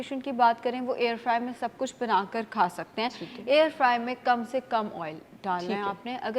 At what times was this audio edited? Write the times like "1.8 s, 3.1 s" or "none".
none

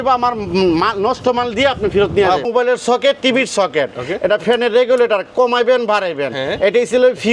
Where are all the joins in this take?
2.5 s

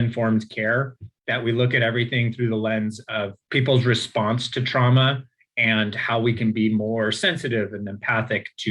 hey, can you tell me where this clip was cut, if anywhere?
3.4 s

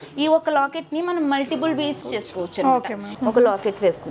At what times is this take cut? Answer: 2.0 s, 3.1 s

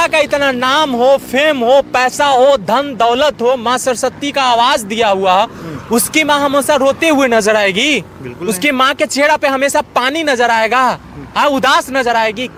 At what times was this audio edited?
none

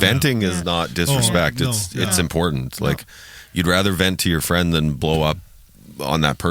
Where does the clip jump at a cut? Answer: none

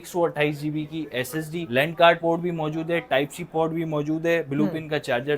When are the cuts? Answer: none

